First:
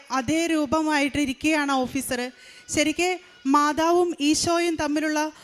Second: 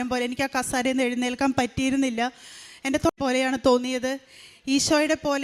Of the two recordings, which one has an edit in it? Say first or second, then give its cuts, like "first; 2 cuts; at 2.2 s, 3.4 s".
second; 1 cut; at 3.2 s